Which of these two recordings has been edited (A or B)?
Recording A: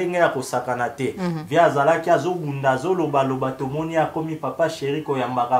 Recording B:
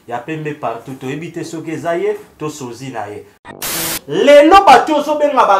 B